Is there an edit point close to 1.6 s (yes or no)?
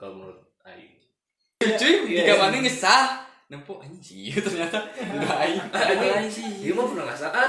yes